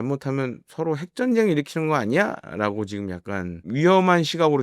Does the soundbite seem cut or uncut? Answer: cut